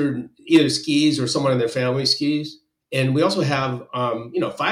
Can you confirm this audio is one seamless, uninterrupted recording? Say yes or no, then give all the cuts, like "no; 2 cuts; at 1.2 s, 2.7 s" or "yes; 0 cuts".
yes; 0 cuts